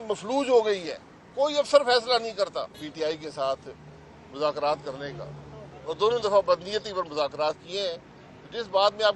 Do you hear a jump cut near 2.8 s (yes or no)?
yes